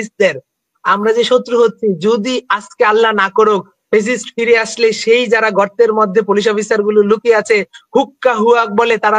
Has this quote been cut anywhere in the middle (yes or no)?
no